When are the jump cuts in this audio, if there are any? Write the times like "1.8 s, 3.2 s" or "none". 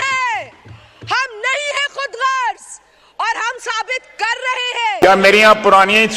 5.0 s